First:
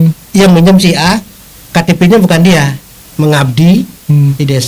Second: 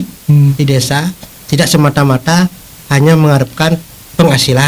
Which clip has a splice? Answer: first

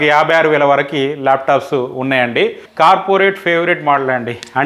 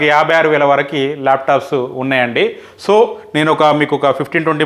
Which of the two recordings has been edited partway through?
first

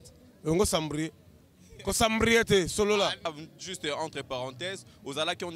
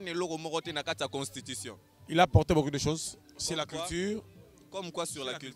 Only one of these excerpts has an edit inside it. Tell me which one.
first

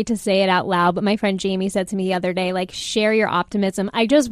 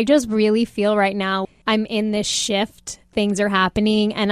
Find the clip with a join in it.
second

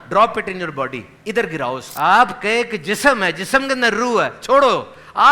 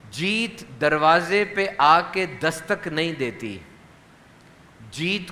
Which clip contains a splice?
first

